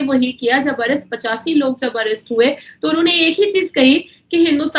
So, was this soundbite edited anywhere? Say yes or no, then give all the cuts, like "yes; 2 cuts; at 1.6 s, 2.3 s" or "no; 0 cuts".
no; 0 cuts